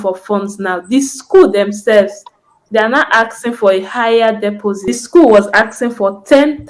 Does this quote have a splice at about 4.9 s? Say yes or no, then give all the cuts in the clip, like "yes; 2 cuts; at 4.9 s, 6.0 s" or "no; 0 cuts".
yes; 1 cut; at 4.9 s